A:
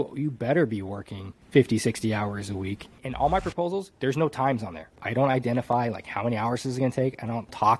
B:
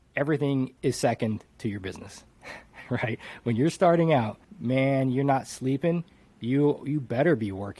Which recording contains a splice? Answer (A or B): A